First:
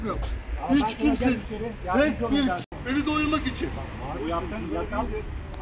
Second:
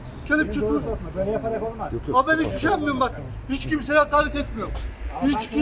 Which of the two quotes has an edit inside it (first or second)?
first